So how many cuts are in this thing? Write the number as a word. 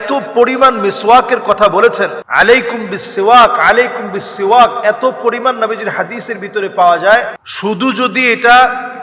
two